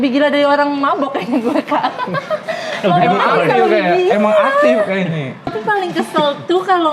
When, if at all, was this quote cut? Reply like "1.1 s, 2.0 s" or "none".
5.5 s